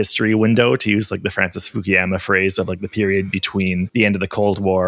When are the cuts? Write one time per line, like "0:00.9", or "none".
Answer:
0:03.9